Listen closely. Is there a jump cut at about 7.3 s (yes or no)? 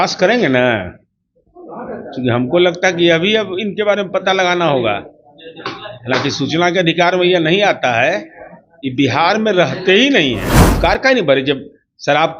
no